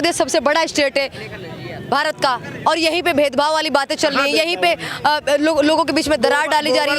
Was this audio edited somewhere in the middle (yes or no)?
no